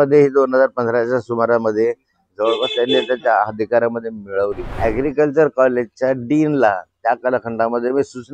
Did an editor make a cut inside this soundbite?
yes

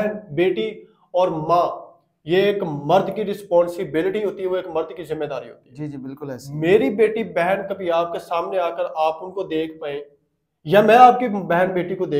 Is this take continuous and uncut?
yes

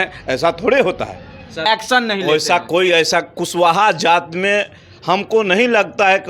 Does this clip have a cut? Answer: yes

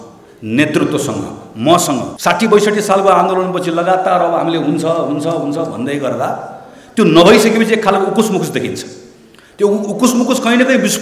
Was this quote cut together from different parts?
yes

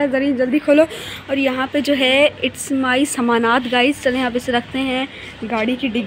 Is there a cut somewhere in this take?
no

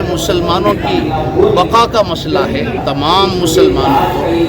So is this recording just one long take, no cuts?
no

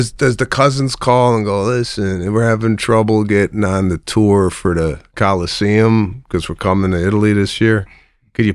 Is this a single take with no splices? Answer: yes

